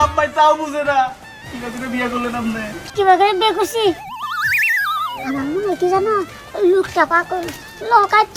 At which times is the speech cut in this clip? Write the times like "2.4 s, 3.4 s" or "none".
none